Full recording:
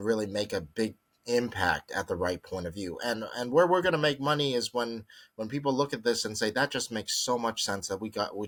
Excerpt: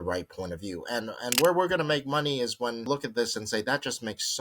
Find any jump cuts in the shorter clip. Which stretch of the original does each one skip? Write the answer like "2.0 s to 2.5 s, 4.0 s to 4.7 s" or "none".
5.0 s to 5.8 s